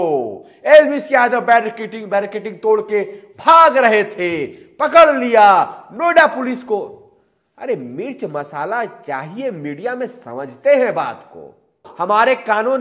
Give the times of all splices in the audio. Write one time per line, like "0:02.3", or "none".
0:11.9

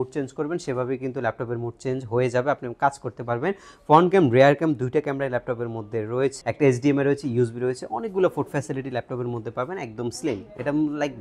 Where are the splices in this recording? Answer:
0:06.4

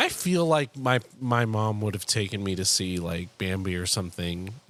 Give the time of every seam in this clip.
none

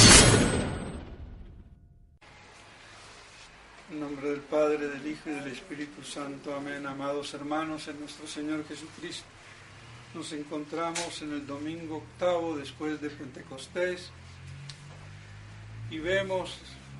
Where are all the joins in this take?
0:04.7

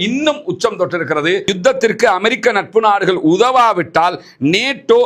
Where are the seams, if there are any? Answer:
0:01.5

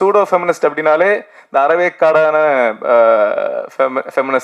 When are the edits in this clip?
none

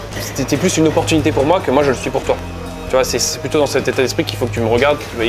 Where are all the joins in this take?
none

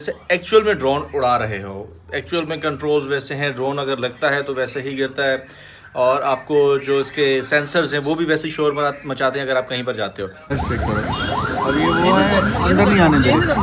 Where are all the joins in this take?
0:10.4

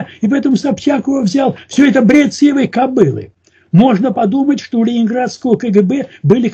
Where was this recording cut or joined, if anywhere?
none

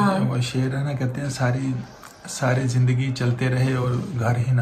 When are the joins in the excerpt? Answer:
none

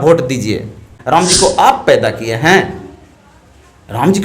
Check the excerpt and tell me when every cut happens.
0:01.2

